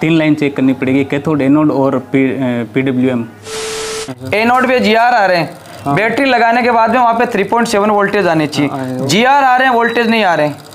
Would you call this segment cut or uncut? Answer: cut